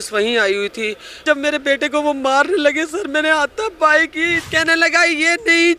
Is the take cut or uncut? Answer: cut